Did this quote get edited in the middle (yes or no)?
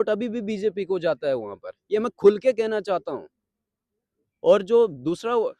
no